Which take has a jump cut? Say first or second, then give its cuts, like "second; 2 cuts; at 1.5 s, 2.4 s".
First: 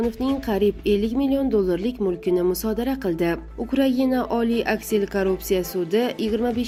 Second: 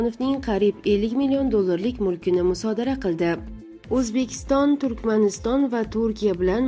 second; 1 cut; at 3.6 s